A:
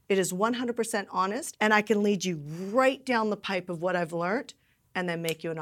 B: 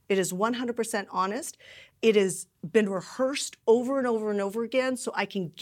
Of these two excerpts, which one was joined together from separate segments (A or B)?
A